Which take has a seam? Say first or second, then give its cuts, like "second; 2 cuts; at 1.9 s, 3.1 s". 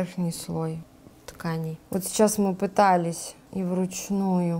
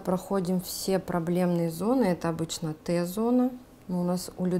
first; 1 cut; at 1.8 s